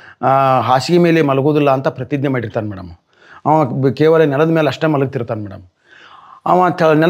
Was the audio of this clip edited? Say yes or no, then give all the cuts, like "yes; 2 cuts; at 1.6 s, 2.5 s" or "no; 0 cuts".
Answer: no; 0 cuts